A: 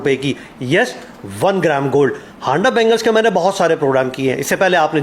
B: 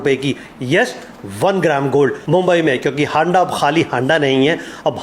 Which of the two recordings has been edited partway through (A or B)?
B